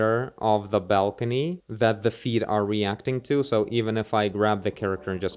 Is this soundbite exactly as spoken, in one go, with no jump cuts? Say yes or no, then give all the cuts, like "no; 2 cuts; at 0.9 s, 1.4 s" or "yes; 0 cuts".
yes; 0 cuts